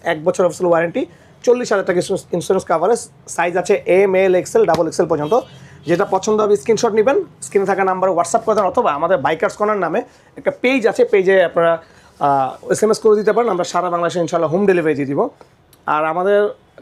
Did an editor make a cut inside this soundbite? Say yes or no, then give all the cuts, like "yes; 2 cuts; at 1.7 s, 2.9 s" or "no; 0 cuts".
no; 0 cuts